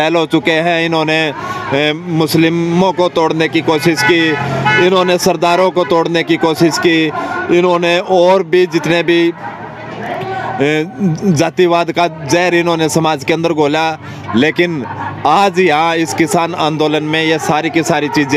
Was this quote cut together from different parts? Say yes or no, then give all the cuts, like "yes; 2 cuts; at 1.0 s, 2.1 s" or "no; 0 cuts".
no; 0 cuts